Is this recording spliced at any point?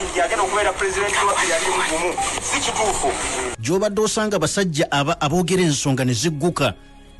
yes; 1 cut; at 3.6 s

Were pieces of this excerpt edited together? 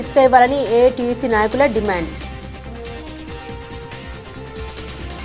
yes; 2 cuts; at 3.1 s, 4.3 s

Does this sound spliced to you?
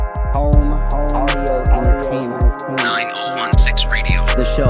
no; 0 cuts

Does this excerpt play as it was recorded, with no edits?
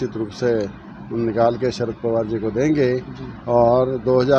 yes; 0 cuts

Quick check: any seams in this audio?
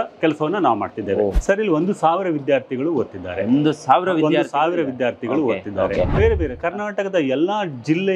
yes; 2 cuts; at 1.3 s, 6.1 s

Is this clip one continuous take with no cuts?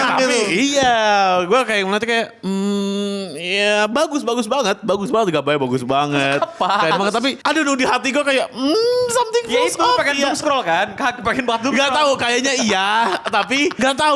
yes; 0 cuts

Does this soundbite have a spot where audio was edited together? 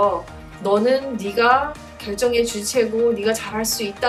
no; 0 cuts

